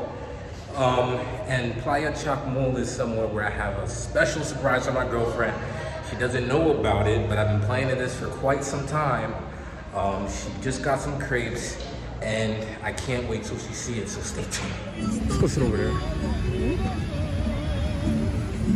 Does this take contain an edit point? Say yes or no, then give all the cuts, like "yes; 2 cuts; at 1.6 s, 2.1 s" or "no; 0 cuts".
no; 0 cuts